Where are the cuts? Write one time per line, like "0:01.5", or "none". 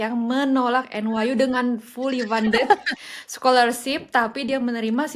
none